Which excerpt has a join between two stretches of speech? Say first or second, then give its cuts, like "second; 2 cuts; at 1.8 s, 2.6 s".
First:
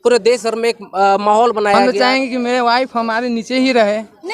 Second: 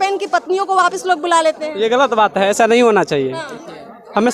first; 1 cut; at 1.8 s